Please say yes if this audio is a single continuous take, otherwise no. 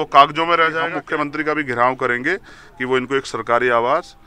no